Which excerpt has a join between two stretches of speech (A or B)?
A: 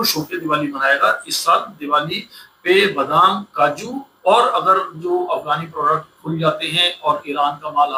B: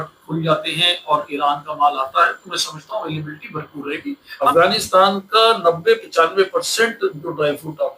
B